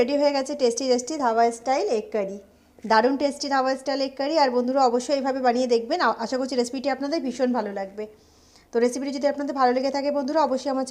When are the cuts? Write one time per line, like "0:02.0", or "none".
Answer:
none